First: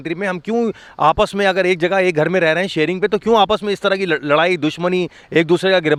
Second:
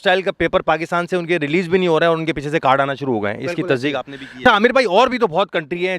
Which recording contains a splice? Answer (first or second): second